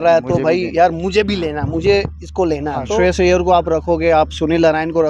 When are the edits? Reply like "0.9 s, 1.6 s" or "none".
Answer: 2.9 s